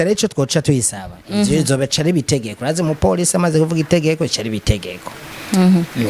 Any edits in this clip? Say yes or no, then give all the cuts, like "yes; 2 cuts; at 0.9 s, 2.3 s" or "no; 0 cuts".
no; 0 cuts